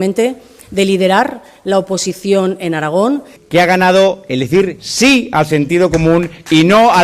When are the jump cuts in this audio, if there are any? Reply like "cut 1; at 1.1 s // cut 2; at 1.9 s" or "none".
cut 1; at 3.3 s